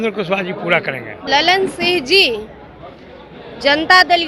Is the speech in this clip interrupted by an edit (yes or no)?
yes